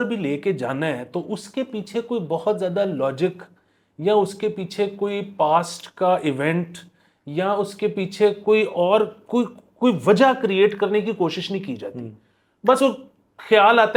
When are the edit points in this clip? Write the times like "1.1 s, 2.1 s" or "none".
none